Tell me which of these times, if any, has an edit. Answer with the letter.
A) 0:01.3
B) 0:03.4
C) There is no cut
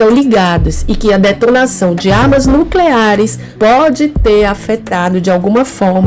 B